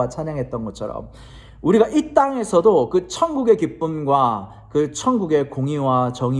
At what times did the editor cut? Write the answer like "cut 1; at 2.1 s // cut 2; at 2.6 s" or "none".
none